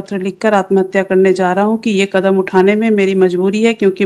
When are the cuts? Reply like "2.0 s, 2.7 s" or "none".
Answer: none